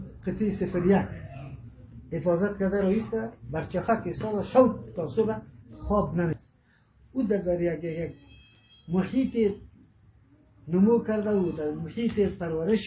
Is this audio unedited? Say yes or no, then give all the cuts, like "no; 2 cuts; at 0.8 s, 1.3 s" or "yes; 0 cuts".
no; 1 cut; at 6.4 s